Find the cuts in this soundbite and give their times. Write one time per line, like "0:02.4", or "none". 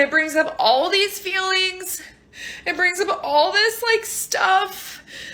none